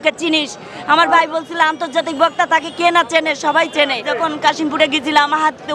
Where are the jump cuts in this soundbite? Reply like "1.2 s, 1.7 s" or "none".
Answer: 4.0 s